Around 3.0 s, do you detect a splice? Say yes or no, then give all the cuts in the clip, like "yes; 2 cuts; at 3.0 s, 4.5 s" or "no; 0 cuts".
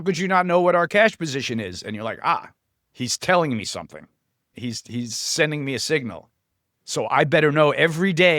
no; 1 cut; at 4.5 s